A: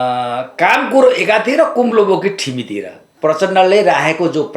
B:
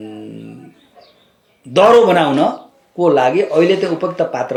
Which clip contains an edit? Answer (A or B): A